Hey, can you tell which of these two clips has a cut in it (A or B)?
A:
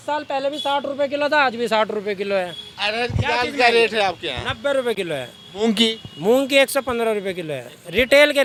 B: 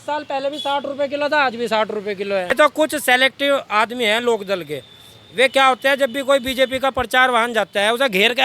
B